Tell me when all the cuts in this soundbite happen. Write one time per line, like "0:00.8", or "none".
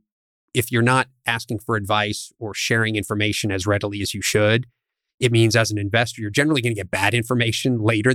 none